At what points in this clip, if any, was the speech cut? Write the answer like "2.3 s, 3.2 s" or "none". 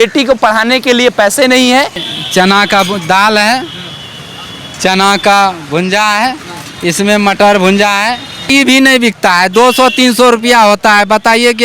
2.1 s, 8.5 s